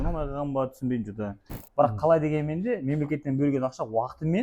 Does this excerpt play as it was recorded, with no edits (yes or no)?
no